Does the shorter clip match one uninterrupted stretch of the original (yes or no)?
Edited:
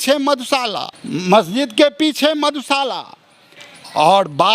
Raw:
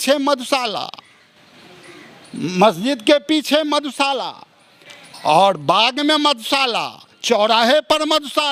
no